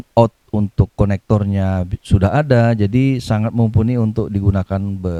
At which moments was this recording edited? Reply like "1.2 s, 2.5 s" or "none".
none